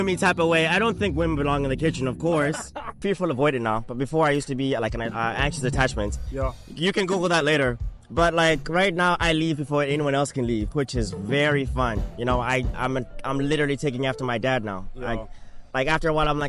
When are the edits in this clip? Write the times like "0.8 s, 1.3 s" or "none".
3.0 s